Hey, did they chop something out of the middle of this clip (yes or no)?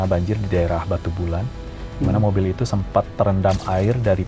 no